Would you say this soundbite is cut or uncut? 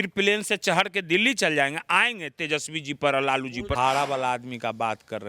cut